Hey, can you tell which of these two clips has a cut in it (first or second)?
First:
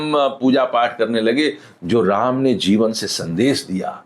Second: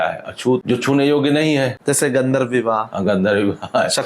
second